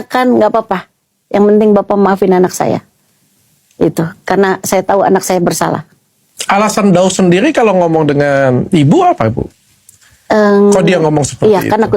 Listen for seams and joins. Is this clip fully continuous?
yes; 0 cuts

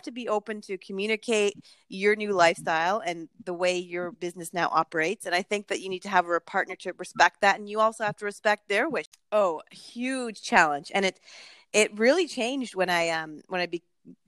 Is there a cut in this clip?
yes; 1 cut; at 9.1 s

